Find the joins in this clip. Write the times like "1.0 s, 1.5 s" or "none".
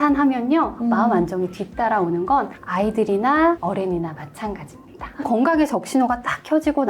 5.2 s

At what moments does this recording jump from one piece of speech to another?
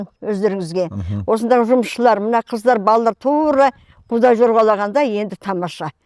none

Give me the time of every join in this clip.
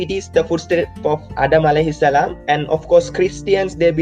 1.3 s, 2.4 s

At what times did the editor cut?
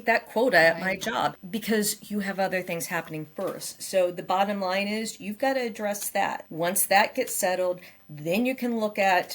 1.4 s, 6.4 s

